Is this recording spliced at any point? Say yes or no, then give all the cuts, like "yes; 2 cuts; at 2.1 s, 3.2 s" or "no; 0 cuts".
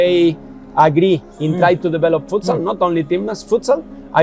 no; 0 cuts